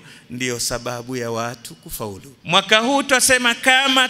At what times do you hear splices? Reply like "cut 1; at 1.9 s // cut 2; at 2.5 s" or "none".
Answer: cut 1; at 2.3 s